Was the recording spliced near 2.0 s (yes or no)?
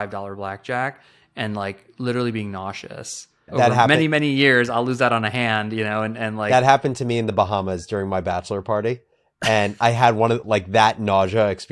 no